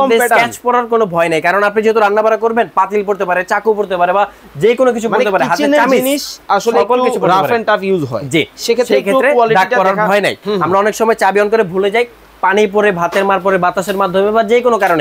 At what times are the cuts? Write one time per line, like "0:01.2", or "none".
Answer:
0:10.4